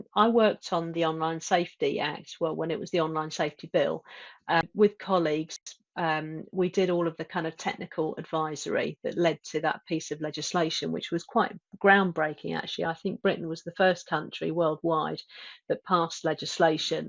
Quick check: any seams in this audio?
yes; 1 cut; at 4.6 s

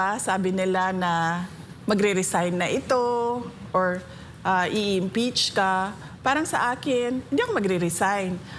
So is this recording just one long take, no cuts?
yes; 0 cuts

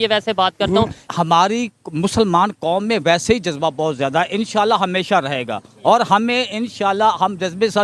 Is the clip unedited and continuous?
no; 1 cut; at 1.0 s

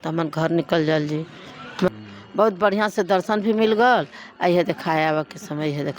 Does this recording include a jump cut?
yes; 1 cut; at 1.9 s

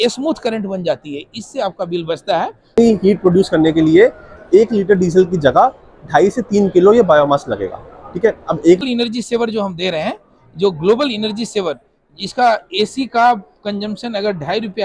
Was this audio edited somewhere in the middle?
yes; 2 cuts; at 2.8 s, 8.8 s

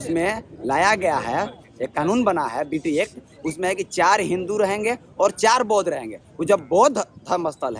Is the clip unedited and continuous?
yes; 0 cuts

